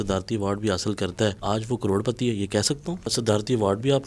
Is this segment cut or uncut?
cut